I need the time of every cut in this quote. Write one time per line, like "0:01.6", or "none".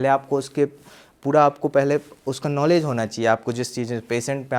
none